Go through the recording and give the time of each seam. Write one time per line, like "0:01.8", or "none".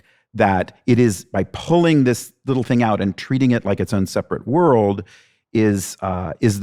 none